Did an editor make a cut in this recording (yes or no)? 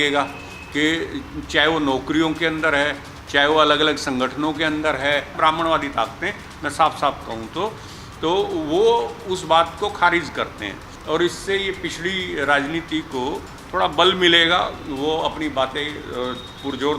yes